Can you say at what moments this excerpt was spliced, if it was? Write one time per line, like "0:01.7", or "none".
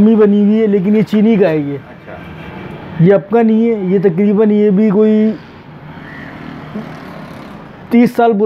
none